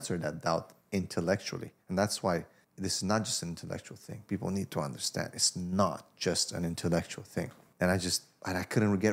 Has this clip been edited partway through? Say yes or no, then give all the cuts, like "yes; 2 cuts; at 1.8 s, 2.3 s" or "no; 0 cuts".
yes; 2 cuts; at 2.6 s, 7.6 s